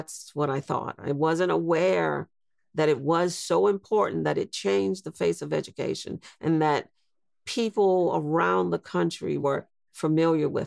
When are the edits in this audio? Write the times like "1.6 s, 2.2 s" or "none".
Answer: 9.4 s